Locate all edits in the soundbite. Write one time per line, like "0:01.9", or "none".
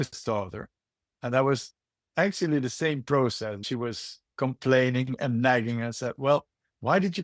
0:03.6

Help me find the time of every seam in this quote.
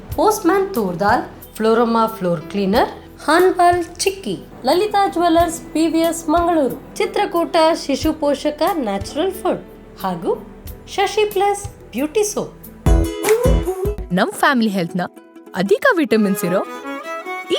0:12.6

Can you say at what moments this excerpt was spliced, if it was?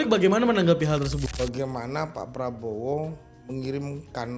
0:01.2

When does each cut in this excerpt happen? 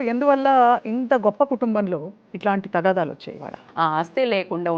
0:03.6

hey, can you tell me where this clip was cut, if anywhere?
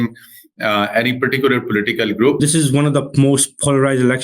0:02.4

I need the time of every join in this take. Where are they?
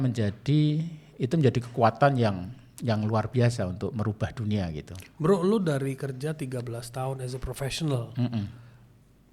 none

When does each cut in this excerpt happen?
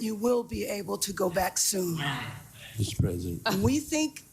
0:02.2

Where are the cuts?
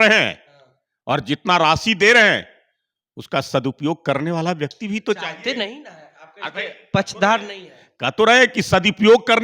none

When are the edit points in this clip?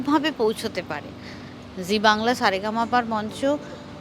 none

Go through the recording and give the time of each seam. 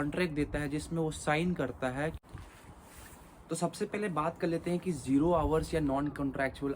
0:02.2

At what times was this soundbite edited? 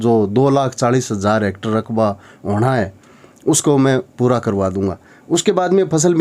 none

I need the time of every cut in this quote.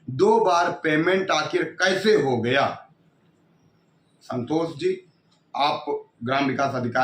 none

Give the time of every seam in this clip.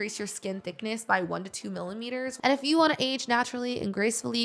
0:02.3

